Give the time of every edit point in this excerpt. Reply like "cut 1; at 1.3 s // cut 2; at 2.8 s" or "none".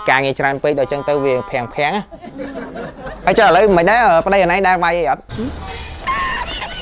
cut 1; at 3.0 s